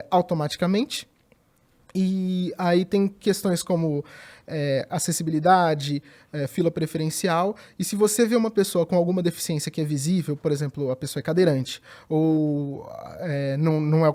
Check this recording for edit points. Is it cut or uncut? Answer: uncut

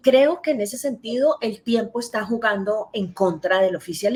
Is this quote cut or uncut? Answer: uncut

